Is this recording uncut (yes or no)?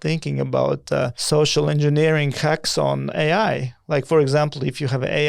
no